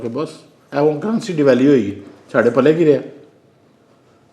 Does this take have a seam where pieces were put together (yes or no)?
no